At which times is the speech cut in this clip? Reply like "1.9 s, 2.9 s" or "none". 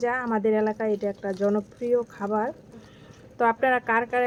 none